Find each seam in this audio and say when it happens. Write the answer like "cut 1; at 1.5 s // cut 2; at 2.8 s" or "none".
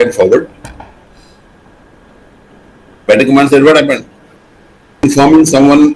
cut 1; at 5.0 s